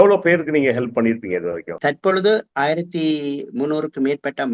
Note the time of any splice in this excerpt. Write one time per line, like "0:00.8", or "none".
0:01.7